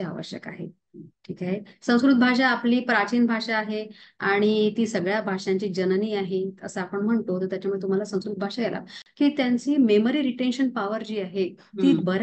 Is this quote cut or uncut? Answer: cut